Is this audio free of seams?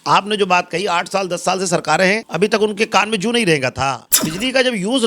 no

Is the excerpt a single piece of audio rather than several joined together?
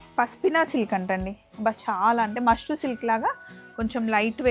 yes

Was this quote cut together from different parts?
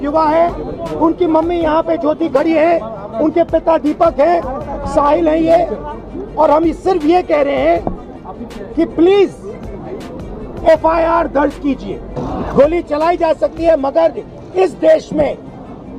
yes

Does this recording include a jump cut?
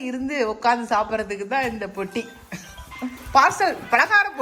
no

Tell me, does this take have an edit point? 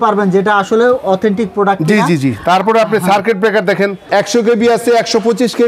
yes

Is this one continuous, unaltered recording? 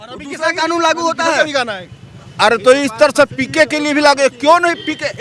yes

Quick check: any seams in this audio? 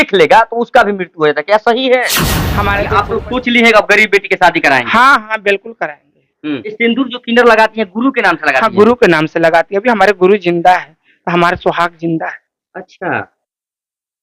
yes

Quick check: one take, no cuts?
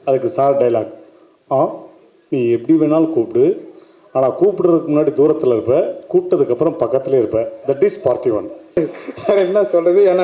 no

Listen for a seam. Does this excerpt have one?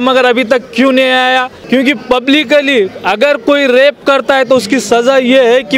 yes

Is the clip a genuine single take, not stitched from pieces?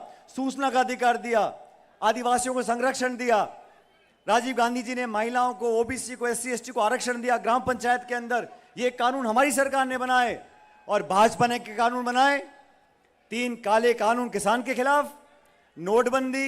yes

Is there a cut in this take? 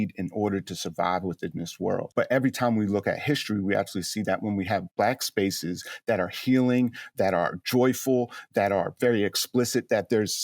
yes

